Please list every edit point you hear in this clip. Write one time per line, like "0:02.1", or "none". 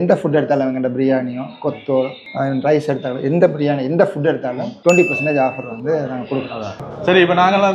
0:06.8

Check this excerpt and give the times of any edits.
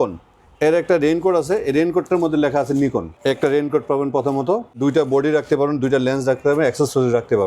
0:03.1
0:04.8

